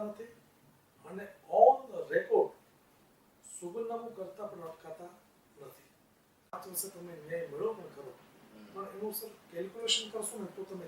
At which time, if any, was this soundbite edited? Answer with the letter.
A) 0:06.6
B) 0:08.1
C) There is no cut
A